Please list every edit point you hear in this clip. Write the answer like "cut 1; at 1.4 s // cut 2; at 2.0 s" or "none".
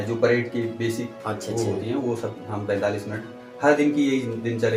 none